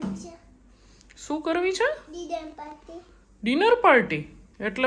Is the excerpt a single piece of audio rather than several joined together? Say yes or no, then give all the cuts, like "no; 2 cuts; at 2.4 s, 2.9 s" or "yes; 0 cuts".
yes; 0 cuts